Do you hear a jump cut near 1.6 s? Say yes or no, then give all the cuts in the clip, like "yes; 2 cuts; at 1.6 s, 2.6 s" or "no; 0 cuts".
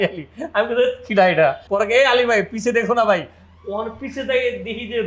yes; 1 cut; at 1.6 s